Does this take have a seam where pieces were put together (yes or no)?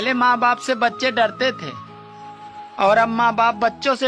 no